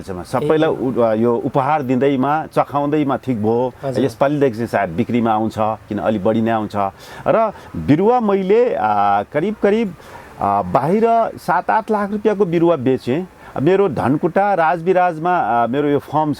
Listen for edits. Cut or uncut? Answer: uncut